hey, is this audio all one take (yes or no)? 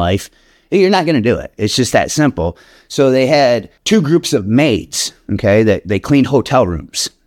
no